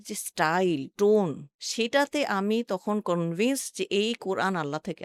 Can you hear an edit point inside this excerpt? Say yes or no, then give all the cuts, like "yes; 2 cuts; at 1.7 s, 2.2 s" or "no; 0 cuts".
no; 0 cuts